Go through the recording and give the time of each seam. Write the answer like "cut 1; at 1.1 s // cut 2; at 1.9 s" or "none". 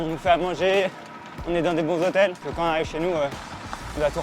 cut 1; at 2.4 s